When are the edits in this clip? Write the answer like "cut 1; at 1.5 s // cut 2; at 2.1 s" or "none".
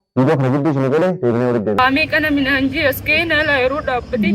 cut 1; at 1.8 s